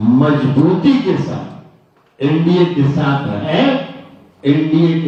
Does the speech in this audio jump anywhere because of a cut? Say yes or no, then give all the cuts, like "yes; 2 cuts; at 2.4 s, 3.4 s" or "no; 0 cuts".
no; 0 cuts